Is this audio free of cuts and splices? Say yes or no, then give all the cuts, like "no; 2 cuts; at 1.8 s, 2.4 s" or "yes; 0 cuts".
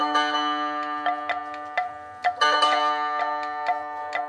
yes; 0 cuts